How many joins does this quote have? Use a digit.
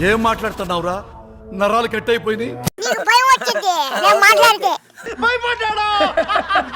1